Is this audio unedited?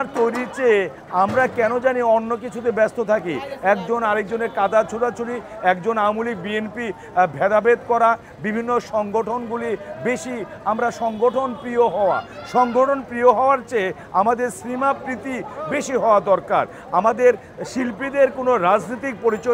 yes; 0 cuts

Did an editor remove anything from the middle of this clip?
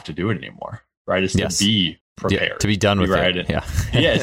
no; 0 cuts

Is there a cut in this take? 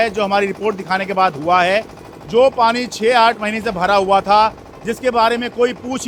no; 0 cuts

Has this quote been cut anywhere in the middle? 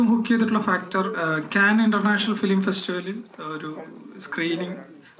no; 0 cuts

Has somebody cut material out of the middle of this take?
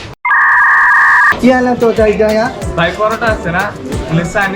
yes; 1 cut; at 1.4 s

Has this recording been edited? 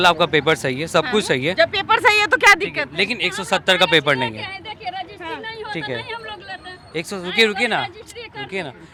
no; 0 cuts

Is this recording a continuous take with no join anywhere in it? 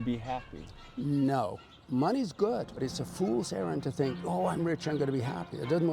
no; 1 cut; at 2.8 s

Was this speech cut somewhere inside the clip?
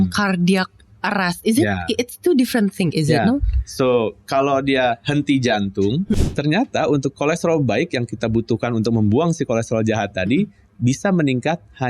yes; 1 cut; at 6.2 s

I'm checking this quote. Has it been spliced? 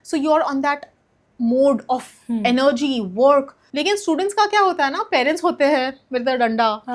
yes; 1 cut; at 3.6 s

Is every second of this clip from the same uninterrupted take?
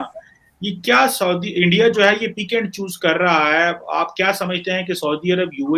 yes; 0 cuts

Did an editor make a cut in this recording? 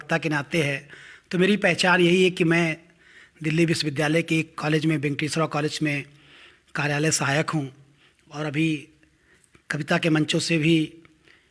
yes; 1 cut; at 10.5 s

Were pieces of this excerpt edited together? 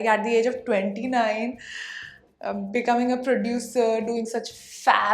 no; 0 cuts

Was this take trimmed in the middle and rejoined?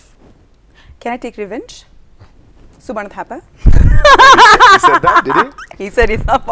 yes; 1 cut; at 1.5 s

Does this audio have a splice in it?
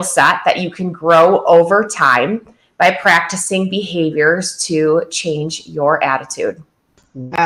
no; 0 cuts

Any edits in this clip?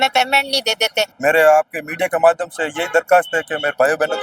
yes; 1 cut; at 1.1 s

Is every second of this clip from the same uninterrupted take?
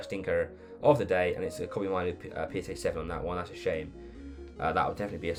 yes; 0 cuts

